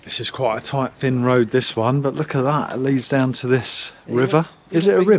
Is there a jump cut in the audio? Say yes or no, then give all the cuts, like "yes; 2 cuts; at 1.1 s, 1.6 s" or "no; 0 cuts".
no; 0 cuts